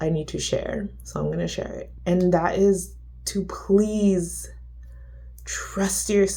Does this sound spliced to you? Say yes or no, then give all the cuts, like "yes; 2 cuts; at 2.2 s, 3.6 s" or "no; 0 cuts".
yes; 1 cut; at 1.9 s